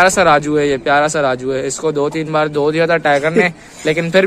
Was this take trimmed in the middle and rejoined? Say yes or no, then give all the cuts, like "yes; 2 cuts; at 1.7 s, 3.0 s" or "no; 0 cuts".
no; 0 cuts